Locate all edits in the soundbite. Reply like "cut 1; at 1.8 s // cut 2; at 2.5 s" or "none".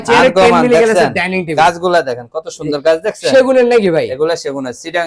none